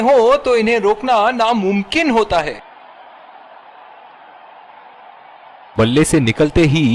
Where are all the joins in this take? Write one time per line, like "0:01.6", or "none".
0:02.6
0:05.7